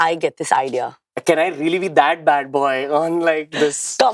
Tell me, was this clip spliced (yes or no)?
yes